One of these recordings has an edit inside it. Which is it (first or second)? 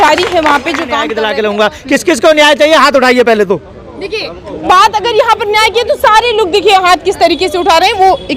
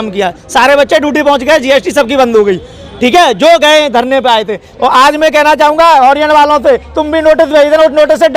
first